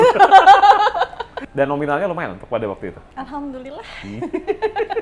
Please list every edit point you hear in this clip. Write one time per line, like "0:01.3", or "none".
0:01.3
0:03.0